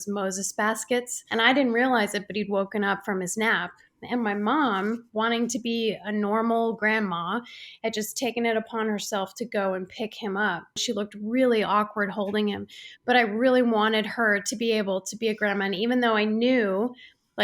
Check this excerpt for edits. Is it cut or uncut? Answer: cut